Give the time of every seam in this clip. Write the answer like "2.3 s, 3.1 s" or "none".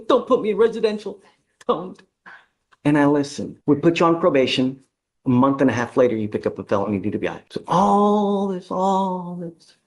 3.4 s, 7.5 s